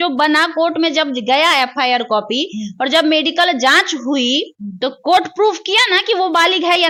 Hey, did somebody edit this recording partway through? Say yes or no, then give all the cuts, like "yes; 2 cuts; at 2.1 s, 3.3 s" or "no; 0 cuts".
no; 0 cuts